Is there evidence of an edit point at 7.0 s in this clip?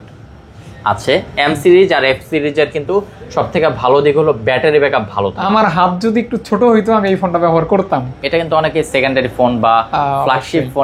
no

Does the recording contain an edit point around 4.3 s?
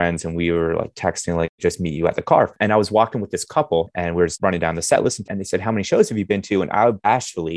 yes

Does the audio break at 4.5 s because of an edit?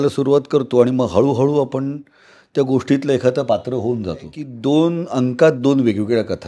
yes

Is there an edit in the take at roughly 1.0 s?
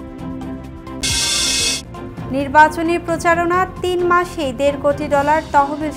yes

